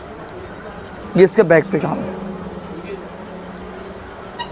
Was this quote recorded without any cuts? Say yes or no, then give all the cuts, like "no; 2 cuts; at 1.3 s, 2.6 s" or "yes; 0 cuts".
no; 1 cut; at 1.0 s